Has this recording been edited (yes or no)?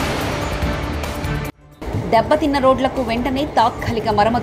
yes